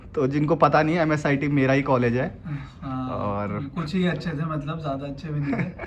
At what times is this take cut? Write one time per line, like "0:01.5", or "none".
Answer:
none